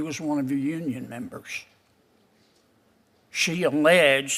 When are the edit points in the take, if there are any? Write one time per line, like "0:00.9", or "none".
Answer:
none

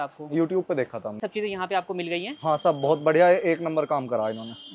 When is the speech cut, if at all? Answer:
0:01.2

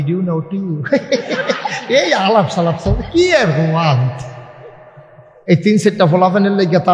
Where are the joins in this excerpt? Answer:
0:05.3

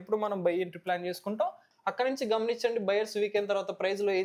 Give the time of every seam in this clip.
0:01.7

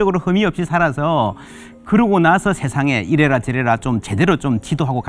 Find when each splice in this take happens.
none

